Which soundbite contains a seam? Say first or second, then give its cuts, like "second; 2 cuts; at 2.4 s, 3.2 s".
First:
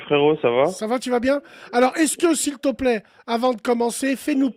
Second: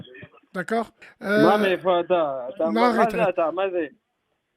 second; 1 cut; at 1.0 s